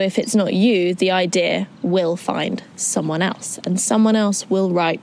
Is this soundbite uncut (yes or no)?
yes